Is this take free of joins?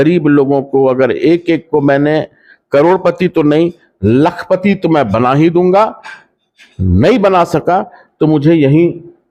yes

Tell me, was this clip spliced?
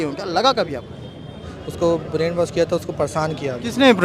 yes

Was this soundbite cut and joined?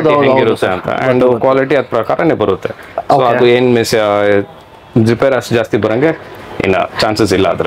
no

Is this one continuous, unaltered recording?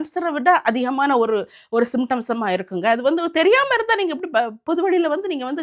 yes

